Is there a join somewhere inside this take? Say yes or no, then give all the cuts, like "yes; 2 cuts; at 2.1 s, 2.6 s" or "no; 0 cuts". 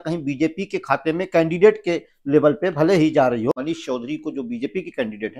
yes; 1 cut; at 3.6 s